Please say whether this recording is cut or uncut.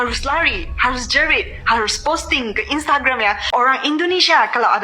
cut